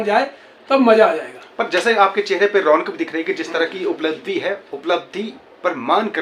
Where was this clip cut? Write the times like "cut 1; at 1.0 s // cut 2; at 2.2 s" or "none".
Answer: none

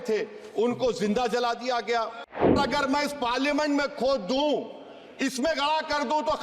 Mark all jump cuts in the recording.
cut 1; at 2.6 s

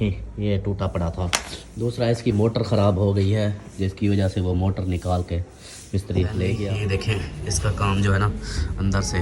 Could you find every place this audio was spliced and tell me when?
cut 1; at 6.7 s

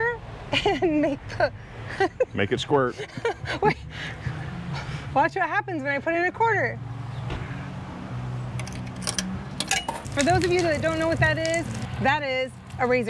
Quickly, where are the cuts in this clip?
cut 1; at 10.1 s

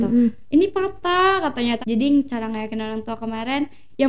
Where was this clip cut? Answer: cut 1; at 1.8 s

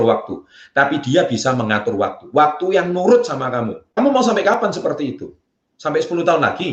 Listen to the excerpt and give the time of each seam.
cut 1; at 4.0 s

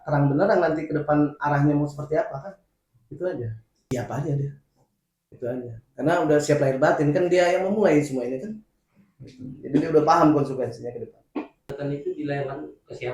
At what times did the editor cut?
cut 1; at 3.9 s // cut 2; at 11.7 s

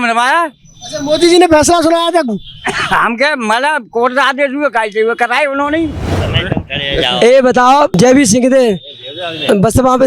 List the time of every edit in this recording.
cut 1; at 6.2 s // cut 2; at 8.0 s

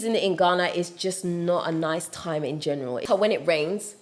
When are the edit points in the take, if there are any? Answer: cut 1; at 3.0 s

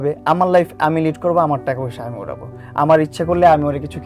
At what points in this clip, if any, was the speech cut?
none

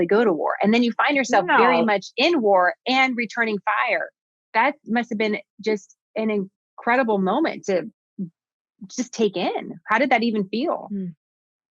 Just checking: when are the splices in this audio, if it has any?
none

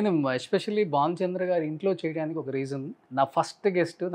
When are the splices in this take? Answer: cut 1; at 3.0 s

